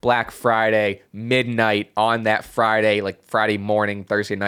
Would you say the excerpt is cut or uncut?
uncut